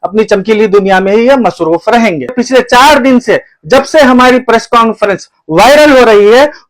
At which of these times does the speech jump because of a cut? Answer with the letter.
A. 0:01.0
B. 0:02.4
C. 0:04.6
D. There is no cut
B